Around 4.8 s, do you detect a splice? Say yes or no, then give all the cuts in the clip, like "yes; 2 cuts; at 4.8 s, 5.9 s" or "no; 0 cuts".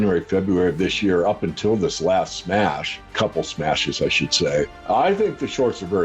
yes; 2 cuts; at 3.1 s, 4.8 s